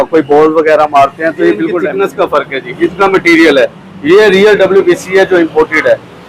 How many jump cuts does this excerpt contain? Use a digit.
1